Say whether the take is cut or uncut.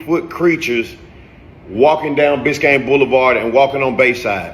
cut